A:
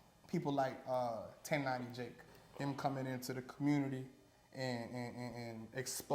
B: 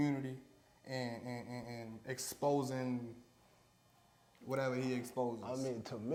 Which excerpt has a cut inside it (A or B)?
A